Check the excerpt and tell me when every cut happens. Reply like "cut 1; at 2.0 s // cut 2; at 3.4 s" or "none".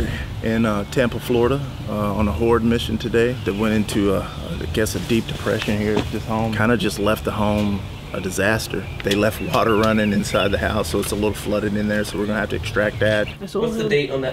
cut 1; at 3.4 s // cut 2; at 6.5 s // cut 3; at 8.9 s // cut 4; at 13.3 s